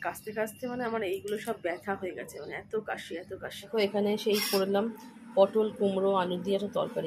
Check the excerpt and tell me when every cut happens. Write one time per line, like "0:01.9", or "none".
0:03.6

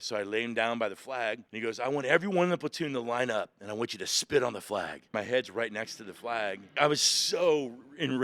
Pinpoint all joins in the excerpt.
0:01.5
0:05.1
0:06.7

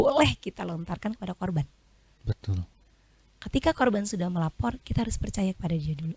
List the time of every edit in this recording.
none

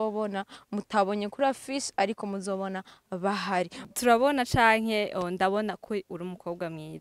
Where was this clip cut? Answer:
0:03.9

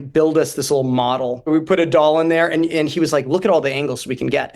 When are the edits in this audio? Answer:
0:01.5

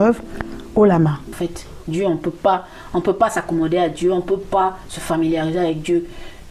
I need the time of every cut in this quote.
0:01.3

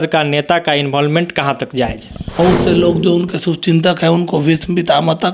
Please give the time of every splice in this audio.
0:02.4

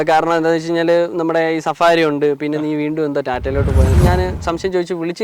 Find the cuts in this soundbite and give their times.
0:04.0

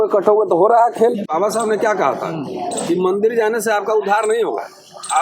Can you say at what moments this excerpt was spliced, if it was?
0:01.3

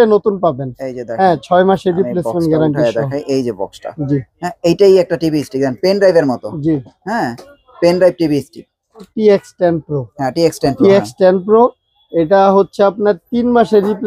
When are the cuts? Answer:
0:09.1

